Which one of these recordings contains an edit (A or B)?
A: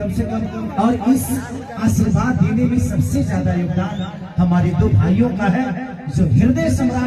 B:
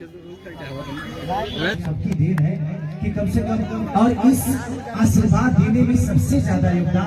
B